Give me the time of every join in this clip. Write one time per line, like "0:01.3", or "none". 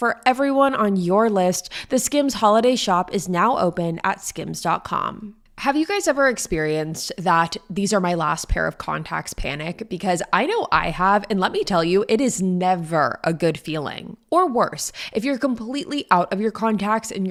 none